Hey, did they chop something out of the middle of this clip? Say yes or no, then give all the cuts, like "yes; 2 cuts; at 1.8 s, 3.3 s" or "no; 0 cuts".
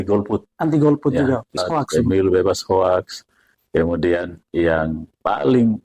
yes; 1 cut; at 1.5 s